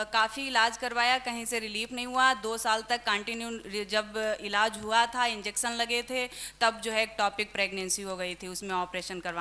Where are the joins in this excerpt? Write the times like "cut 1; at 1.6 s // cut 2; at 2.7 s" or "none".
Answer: none